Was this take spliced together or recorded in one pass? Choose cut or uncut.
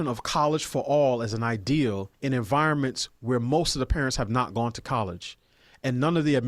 cut